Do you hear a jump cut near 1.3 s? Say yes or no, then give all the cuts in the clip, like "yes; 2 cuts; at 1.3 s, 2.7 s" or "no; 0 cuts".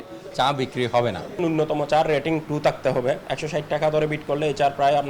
yes; 2 cuts; at 1.3 s, 3.3 s